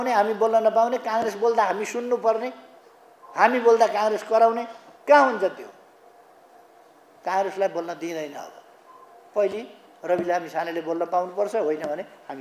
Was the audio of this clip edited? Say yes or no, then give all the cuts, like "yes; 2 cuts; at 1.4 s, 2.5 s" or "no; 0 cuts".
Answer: no; 0 cuts